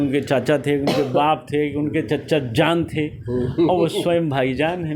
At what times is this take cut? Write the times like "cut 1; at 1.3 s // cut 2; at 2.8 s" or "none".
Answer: none